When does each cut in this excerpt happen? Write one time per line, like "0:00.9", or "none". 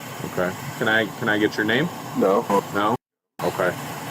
0:02.7